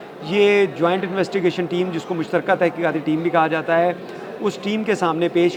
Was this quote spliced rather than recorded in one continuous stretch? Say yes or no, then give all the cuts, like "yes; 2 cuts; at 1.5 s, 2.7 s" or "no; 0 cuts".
no; 0 cuts